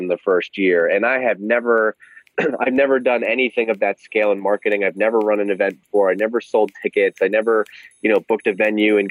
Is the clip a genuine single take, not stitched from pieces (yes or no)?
yes